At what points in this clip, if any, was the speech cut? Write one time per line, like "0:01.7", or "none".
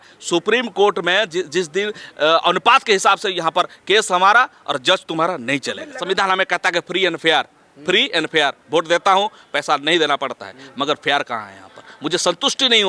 0:05.9